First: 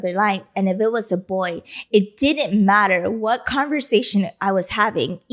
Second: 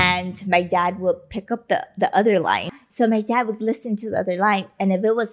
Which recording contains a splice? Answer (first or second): second